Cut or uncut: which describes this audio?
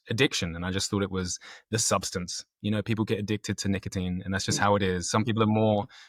uncut